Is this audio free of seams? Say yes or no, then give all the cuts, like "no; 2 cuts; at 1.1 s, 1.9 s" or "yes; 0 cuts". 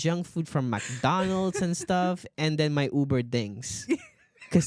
yes; 0 cuts